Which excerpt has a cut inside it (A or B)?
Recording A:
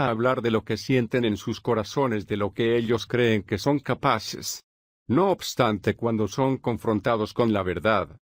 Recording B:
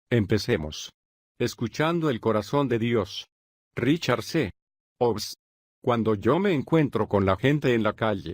B